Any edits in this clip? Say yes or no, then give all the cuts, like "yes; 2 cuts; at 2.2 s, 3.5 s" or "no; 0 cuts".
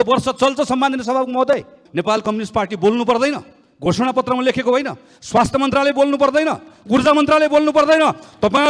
yes; 1 cut; at 1.8 s